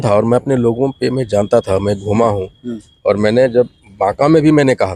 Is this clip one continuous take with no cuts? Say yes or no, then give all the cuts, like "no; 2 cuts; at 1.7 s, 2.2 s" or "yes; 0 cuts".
yes; 0 cuts